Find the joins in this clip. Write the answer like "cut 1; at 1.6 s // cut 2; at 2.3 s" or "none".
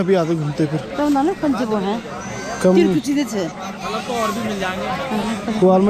none